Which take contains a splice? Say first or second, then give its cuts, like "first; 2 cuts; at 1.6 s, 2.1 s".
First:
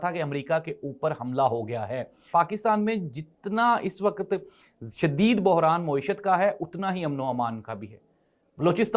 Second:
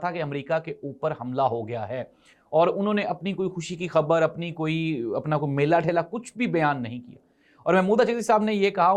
first; 1 cut; at 2.2 s